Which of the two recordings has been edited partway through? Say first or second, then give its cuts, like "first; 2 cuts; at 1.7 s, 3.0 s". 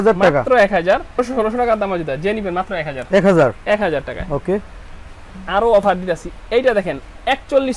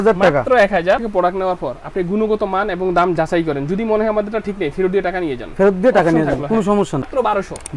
second; 2 cuts; at 1.1 s, 6.6 s